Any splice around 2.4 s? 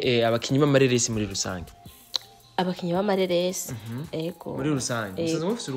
no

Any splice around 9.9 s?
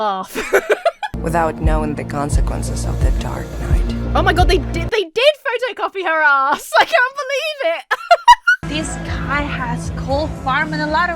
no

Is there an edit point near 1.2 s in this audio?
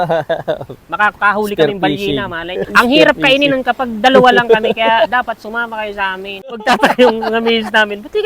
no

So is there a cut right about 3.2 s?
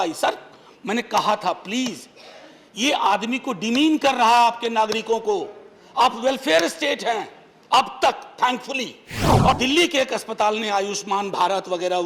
no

